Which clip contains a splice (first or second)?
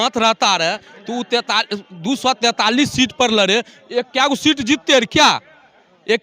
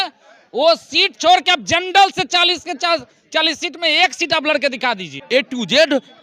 second